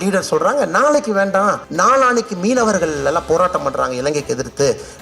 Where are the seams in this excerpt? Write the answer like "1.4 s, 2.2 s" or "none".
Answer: 1.7 s